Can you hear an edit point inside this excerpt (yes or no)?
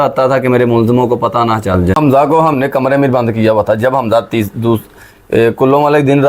yes